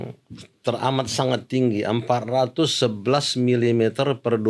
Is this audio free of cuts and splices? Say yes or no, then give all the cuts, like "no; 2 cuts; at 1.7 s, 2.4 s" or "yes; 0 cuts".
yes; 0 cuts